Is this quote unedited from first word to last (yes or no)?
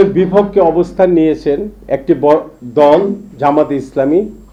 yes